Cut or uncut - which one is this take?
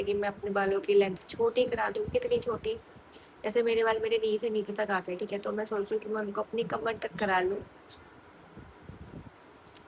uncut